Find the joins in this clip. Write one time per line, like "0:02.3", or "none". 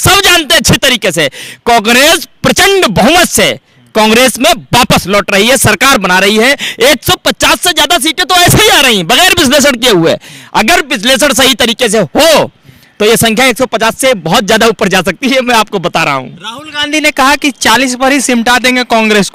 none